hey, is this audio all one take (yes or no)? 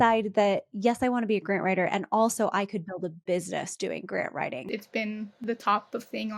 no